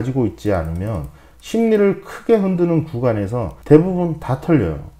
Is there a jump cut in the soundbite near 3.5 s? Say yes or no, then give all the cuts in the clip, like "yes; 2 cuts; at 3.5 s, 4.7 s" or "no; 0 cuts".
yes; 1 cut; at 3.5 s